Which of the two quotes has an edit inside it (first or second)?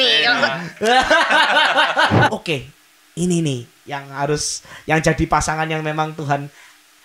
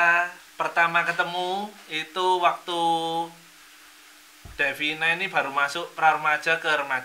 first